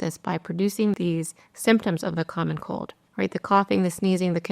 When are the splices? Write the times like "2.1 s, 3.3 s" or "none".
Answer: 1.0 s